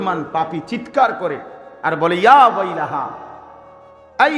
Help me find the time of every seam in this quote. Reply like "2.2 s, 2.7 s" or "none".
none